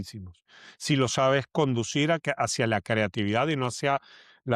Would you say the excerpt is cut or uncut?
uncut